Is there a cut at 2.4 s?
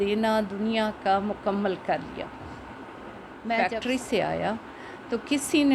no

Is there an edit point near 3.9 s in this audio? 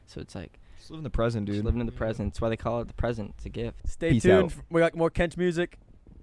yes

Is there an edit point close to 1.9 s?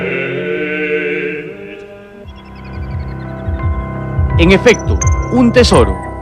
no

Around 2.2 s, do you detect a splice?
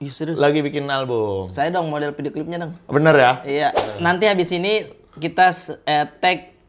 no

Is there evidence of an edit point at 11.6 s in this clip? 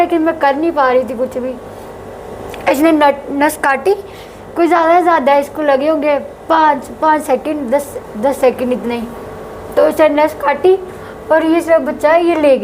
no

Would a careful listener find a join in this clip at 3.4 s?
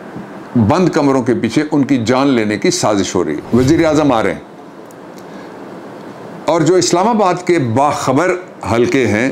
yes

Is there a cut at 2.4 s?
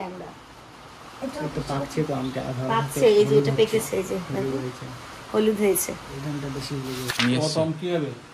no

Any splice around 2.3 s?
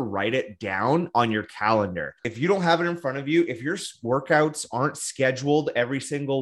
yes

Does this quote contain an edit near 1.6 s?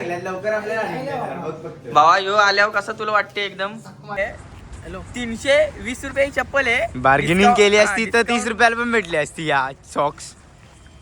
no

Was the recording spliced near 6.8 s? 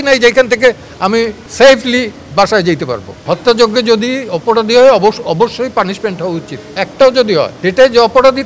yes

